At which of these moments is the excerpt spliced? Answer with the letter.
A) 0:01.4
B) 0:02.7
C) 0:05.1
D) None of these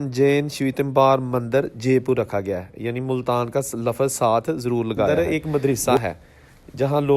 C